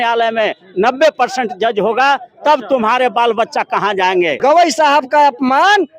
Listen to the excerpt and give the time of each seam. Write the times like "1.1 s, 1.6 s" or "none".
4.4 s